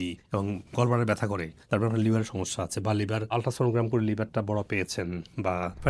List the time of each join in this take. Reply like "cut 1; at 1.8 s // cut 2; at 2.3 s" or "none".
none